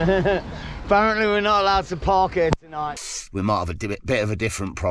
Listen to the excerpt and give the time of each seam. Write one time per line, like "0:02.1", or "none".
0:03.0